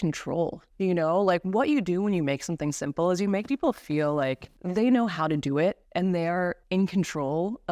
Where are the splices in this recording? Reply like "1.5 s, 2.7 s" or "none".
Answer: none